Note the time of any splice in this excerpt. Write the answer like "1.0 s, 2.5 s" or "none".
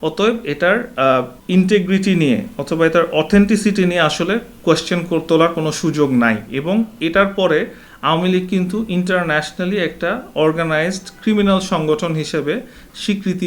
1.4 s